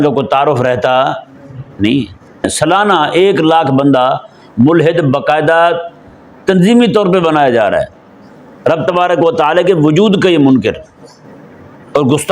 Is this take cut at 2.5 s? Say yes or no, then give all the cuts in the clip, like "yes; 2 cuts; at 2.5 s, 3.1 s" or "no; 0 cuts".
yes; 1 cut; at 2.5 s